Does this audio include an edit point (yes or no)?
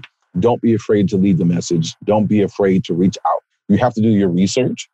yes